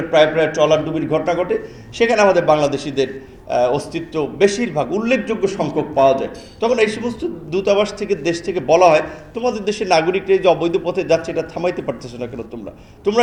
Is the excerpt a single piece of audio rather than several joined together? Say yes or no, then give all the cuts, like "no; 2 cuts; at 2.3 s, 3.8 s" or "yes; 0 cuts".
yes; 0 cuts